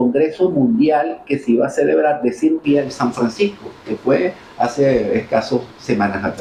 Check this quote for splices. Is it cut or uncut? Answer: uncut